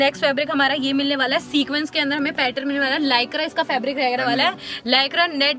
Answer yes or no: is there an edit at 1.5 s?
no